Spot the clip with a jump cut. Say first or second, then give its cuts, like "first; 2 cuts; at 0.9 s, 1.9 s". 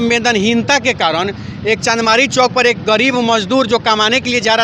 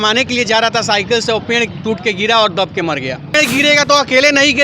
second; 1 cut; at 3.3 s